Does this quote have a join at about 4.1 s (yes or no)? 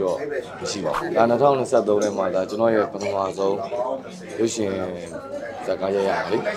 no